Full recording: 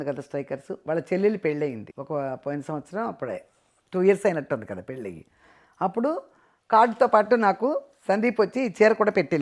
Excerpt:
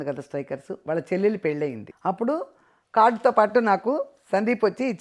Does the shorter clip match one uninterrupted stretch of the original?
no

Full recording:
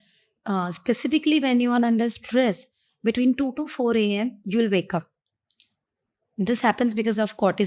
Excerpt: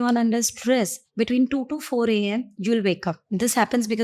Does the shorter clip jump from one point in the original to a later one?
yes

